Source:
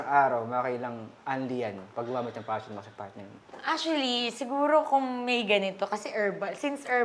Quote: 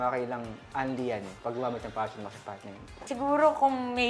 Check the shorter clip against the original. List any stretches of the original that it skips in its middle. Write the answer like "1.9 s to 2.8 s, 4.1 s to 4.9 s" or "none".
3.6 s to 4.3 s